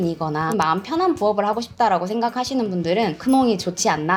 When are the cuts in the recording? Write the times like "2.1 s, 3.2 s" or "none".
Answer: none